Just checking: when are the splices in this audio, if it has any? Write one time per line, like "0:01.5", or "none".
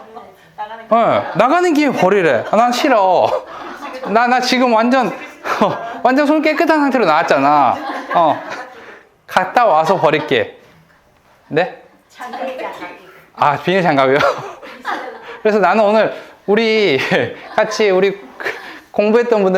none